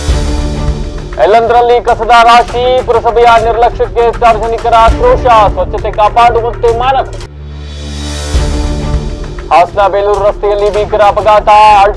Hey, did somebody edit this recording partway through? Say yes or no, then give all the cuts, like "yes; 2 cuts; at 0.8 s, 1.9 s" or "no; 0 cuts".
no; 0 cuts